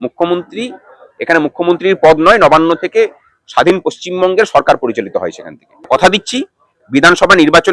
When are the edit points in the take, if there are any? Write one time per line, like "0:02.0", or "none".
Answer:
0:05.9